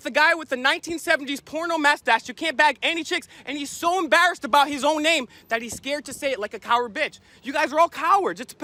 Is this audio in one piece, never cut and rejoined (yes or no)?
yes